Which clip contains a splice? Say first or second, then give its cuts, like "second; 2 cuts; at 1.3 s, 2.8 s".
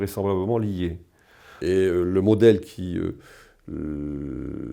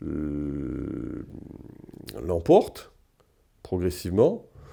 first; 1 cut; at 1.5 s